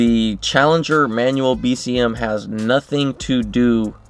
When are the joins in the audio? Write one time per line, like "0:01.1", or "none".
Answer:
none